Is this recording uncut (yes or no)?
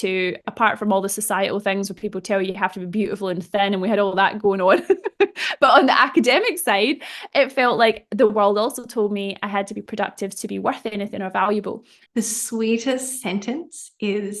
no